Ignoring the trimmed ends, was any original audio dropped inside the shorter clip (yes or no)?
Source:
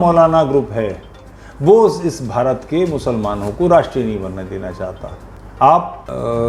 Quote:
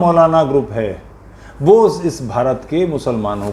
no